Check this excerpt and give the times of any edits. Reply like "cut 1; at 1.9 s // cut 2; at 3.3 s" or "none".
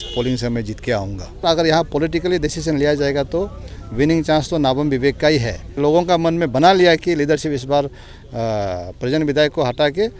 cut 1; at 1.4 s // cut 2; at 5.8 s